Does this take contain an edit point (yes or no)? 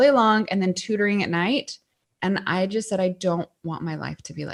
no